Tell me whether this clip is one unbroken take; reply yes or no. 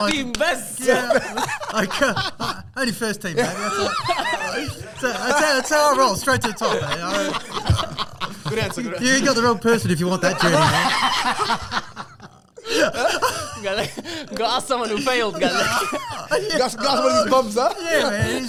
yes